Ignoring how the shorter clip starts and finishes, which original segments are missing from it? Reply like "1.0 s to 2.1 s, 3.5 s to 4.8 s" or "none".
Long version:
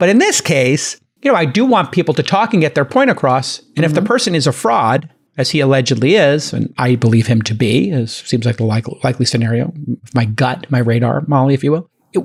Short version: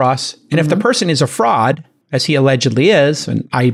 none